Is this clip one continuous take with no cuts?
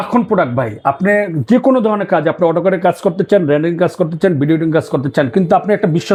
yes; 0 cuts

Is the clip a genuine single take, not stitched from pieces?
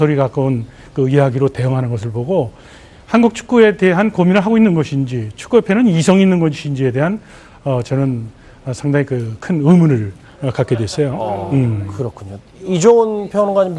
no; 1 cut; at 9.8 s

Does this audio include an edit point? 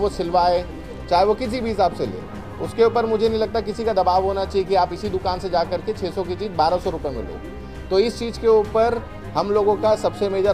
no; 0 cuts

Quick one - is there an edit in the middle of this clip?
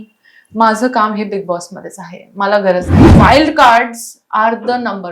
yes; 1 cut; at 3.0 s

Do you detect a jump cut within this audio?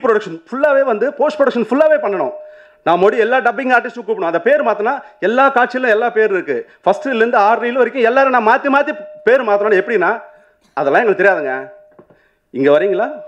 no; 0 cuts

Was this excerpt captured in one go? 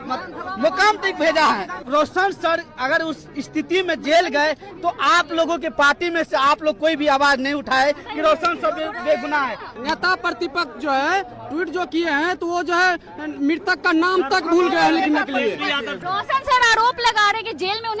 no; 3 cuts; at 1.8 s, 9.7 s, 15.9 s

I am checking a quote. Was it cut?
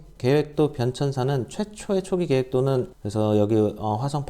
yes; 1 cut; at 2.9 s

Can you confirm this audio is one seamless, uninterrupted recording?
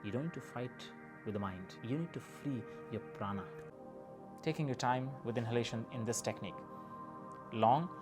no; 1 cut; at 3.7 s

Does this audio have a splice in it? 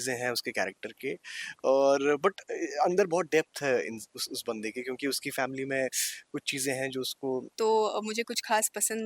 yes; 1 cut; at 7.5 s

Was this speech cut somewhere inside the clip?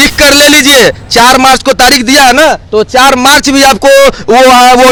no; 0 cuts

